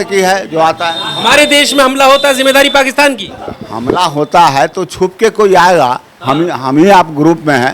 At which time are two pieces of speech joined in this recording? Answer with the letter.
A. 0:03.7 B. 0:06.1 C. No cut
C